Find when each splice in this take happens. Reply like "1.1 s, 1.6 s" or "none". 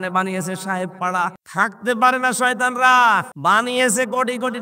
1.4 s, 3.3 s